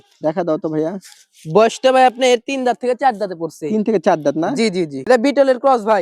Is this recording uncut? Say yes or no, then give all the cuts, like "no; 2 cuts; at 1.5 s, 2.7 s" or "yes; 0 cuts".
no; 1 cut; at 5.0 s